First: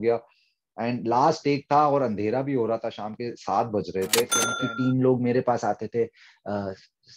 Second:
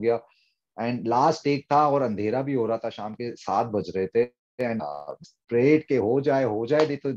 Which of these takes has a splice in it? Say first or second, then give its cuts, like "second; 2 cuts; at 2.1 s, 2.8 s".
first; 1 cut; at 4.4 s